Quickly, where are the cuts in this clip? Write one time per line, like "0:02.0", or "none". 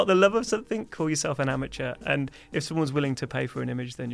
none